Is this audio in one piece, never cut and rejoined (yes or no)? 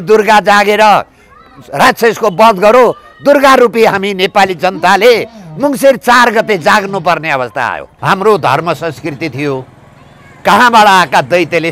no